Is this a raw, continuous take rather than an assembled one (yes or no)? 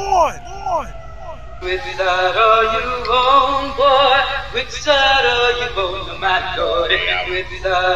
no